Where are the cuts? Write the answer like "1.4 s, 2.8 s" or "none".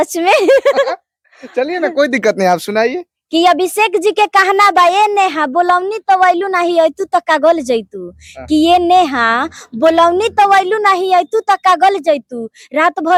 none